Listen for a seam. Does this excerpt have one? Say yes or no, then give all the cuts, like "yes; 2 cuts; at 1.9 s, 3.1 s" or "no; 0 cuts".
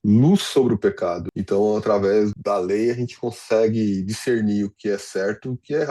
yes; 2 cuts; at 1.2 s, 2.3 s